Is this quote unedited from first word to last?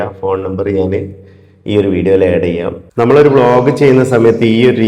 no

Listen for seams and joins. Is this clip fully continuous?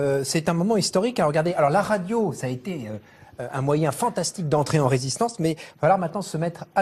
no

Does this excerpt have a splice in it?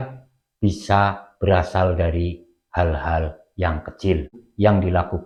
no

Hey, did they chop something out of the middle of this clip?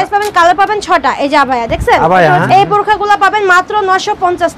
yes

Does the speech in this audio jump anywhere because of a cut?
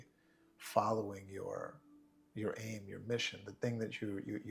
no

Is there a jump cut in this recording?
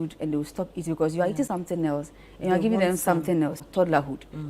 yes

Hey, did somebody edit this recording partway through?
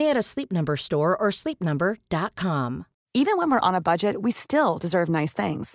yes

